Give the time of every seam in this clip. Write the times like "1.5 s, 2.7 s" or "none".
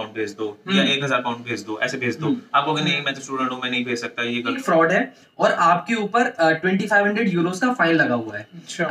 4.6 s